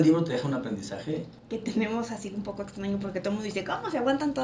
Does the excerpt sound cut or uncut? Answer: cut